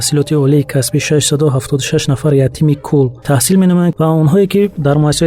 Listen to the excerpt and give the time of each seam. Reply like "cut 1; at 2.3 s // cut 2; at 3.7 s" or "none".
cut 1; at 3.2 s // cut 2; at 3.9 s